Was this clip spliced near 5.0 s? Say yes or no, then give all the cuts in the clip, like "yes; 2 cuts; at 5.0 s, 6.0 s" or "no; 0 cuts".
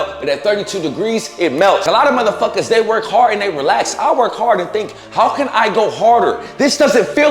no; 1 cut; at 1.8 s